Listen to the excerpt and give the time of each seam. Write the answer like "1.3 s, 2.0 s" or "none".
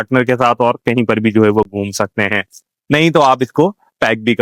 none